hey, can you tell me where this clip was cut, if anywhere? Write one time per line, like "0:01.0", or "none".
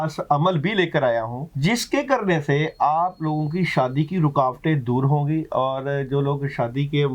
0:01.4